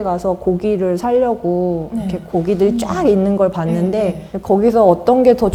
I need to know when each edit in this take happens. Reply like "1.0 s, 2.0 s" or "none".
none